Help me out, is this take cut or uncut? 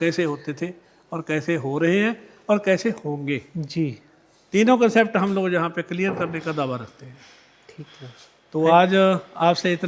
uncut